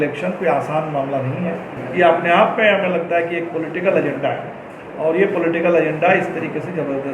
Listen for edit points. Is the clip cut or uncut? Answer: cut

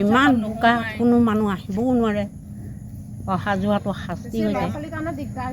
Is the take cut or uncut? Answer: uncut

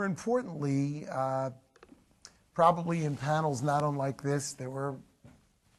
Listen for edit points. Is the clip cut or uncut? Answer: uncut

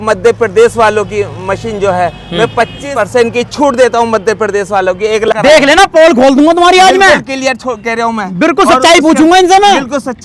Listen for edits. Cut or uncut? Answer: cut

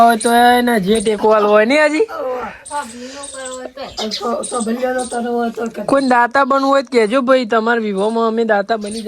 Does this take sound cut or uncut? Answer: uncut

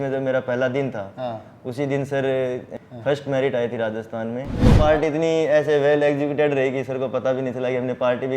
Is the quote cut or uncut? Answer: cut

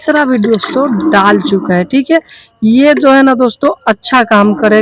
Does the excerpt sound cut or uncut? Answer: uncut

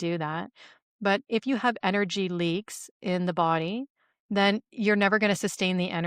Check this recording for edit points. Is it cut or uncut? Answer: uncut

